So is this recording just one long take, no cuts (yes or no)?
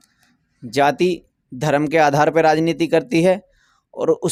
yes